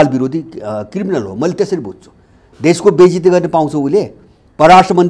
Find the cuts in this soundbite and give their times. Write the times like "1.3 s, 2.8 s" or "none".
none